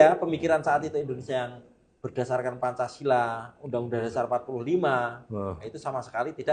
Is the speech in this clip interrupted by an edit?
no; 0 cuts

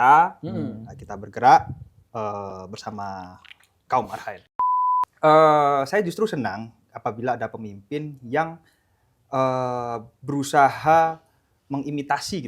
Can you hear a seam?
yes; 1 cut; at 4.5 s

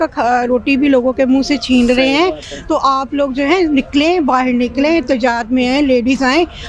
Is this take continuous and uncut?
yes; 0 cuts

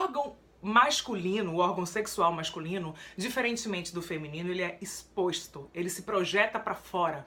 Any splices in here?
yes; 1 cut; at 3.8 s

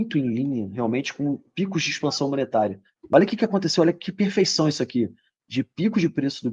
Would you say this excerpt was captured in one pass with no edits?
no; 1 cut; at 2.9 s

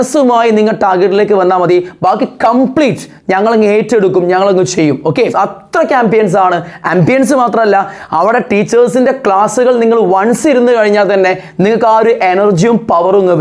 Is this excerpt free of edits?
no; 1 cut; at 5.2 s

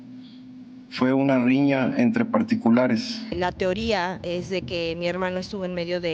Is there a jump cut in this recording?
yes; 1 cut; at 3.3 s

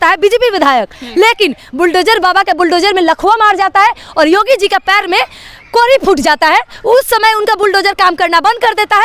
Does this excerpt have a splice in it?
no; 0 cuts

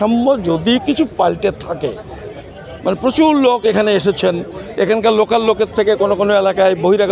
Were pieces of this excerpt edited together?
no; 0 cuts

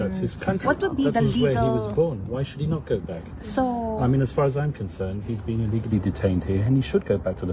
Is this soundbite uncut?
yes; 0 cuts

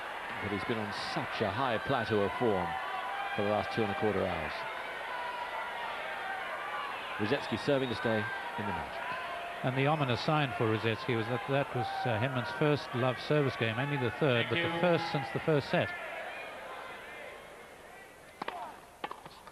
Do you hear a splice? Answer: yes; 1 cut; at 7.1 s

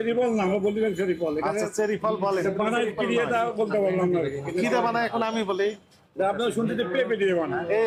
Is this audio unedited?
yes; 0 cuts

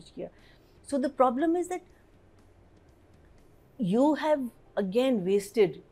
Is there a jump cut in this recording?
no; 0 cuts

